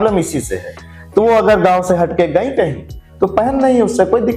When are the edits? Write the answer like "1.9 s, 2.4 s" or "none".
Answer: none